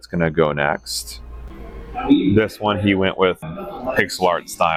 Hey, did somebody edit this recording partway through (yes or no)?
no